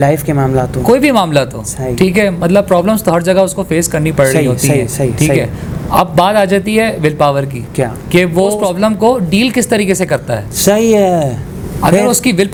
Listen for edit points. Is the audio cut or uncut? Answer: uncut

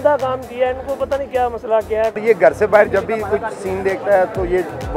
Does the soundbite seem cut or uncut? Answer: cut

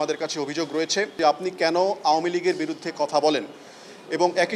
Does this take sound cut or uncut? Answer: cut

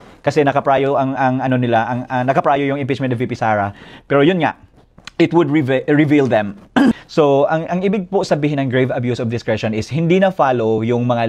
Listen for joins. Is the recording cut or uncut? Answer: cut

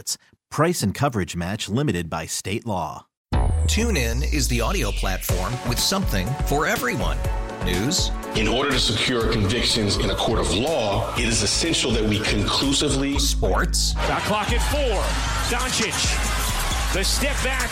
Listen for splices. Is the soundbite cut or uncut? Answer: cut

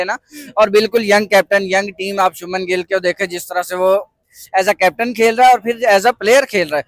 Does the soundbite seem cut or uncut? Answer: uncut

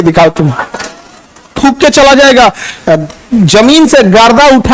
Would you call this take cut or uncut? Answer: cut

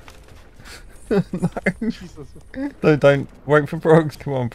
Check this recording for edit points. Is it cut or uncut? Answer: uncut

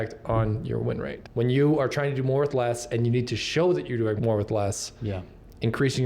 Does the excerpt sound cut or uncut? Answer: cut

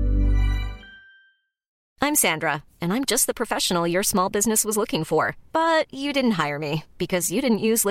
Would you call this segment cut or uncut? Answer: cut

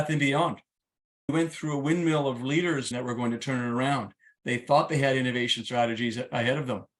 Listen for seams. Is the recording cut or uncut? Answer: cut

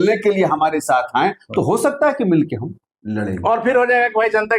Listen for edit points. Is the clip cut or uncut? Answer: uncut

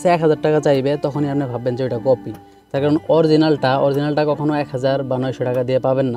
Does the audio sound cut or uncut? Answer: uncut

